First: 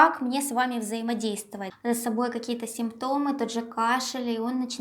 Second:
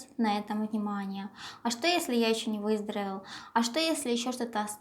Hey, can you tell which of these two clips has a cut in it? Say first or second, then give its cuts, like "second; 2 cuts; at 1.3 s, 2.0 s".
first; 1 cut; at 1.6 s